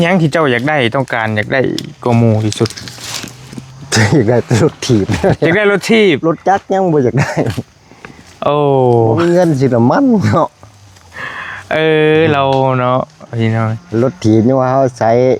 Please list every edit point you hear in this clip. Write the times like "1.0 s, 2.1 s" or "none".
none

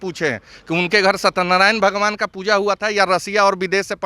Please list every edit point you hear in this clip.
none

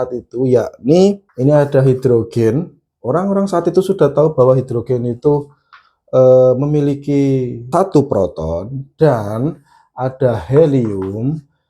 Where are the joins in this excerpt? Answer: 1.3 s, 7.7 s

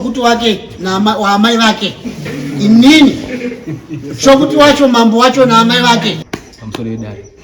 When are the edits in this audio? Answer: 6.2 s

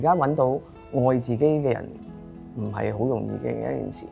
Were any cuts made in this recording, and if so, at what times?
none

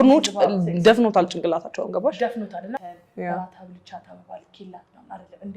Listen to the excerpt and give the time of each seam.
2.8 s

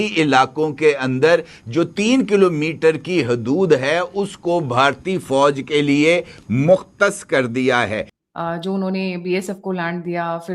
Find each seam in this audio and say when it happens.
8.1 s

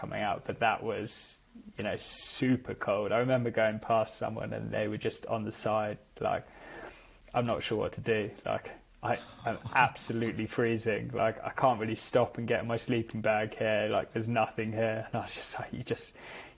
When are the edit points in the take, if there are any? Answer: none

